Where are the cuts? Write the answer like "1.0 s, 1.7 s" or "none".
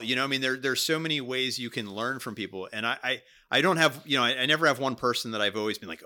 none